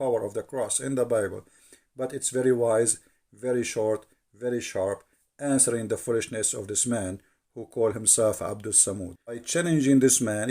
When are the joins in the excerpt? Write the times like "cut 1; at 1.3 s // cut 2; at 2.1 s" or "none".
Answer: cut 1; at 9.5 s